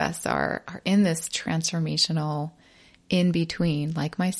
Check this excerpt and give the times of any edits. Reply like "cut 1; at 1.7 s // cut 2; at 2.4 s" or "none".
none